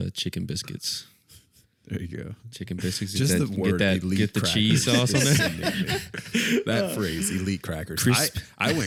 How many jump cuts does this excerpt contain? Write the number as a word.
zero